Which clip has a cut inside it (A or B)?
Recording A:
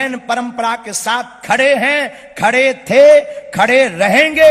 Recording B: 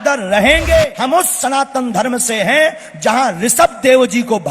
B